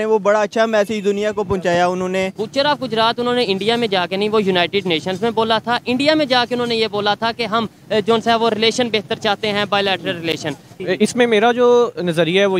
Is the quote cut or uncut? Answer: cut